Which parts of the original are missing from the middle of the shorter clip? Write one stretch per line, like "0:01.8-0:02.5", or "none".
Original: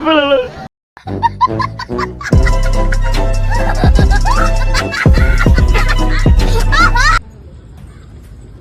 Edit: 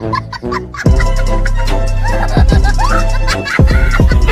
none